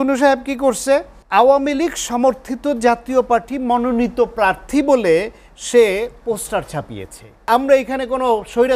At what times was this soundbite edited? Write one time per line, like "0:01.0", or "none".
0:01.2
0:07.5

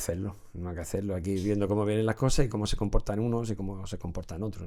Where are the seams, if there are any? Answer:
none

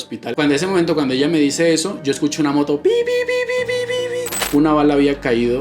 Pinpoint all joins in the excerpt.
0:04.3

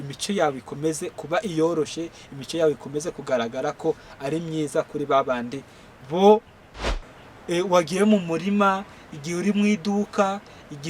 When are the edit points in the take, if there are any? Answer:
0:06.9

